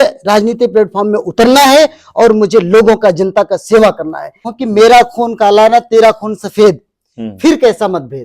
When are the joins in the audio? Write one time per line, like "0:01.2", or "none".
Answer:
0:04.4

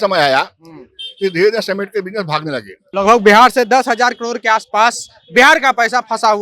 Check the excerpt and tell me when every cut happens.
0:02.8

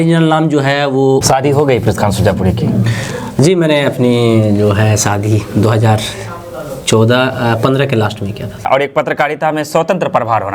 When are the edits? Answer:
0:01.2
0:08.7

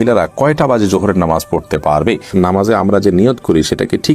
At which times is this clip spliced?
0:02.3

